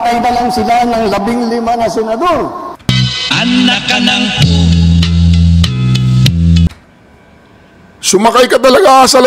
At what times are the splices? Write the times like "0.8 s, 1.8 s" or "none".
2.8 s, 4.8 s, 5.6 s

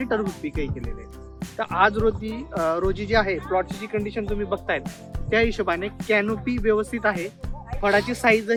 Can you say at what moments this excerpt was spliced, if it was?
none

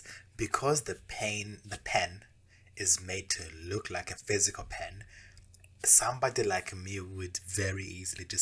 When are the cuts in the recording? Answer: none

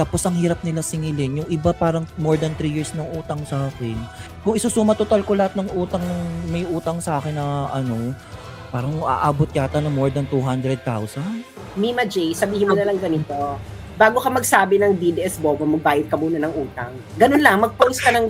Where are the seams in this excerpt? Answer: none

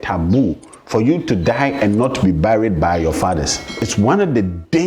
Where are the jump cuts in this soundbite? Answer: 3.8 s

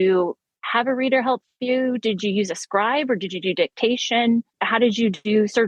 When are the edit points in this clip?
4.6 s

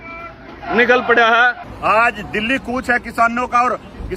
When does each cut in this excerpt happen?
1.7 s

